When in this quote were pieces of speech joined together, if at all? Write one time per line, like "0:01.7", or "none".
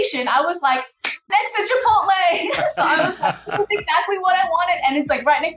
0:01.3